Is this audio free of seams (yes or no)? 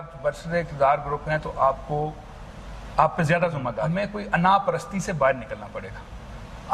no